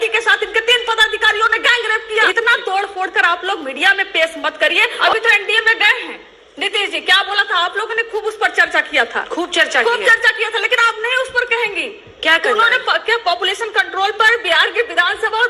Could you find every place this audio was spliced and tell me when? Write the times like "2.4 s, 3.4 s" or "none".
2.0 s, 5.0 s